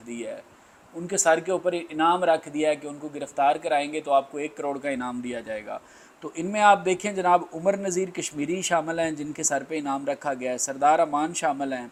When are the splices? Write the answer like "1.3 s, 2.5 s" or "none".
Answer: none

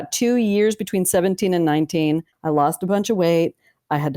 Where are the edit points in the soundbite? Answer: 2.3 s

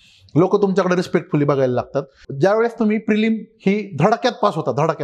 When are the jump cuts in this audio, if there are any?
2.2 s

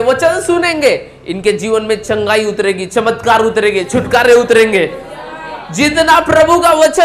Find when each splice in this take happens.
none

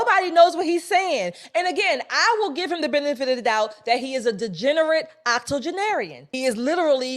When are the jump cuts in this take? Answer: 6.2 s

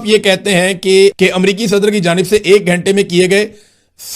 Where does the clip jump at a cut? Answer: 1.1 s

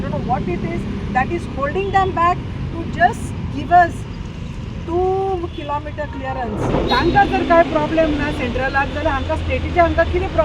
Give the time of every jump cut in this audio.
6.7 s

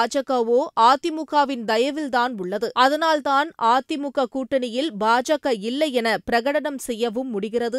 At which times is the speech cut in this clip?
none

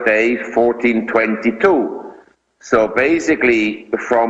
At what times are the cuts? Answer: 2.9 s

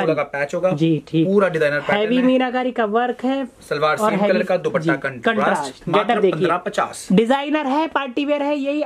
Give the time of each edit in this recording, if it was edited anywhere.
none

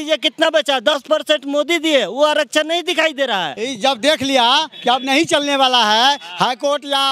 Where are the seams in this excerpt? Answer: 3.6 s

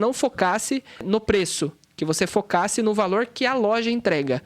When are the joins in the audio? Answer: 1.0 s

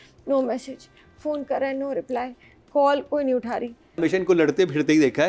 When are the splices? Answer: 4.0 s

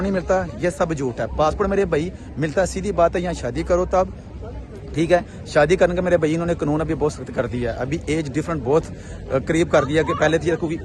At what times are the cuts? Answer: none

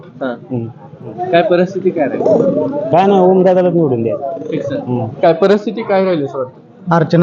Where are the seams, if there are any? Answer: 1.2 s, 5.1 s

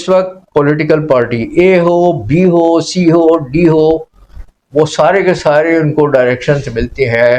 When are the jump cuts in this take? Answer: none

